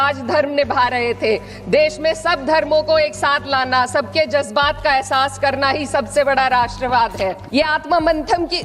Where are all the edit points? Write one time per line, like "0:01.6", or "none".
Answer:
0:07.4